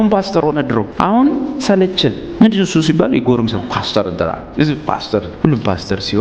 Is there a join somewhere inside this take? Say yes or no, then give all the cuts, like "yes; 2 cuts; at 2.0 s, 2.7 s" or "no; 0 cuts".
yes; 3 cuts; at 0.9 s, 2.2 s, 5.3 s